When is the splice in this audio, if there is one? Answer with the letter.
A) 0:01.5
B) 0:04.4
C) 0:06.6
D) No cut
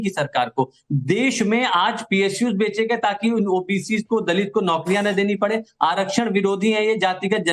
A